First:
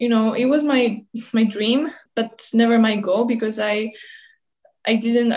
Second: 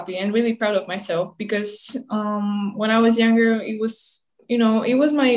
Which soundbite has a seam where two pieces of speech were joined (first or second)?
first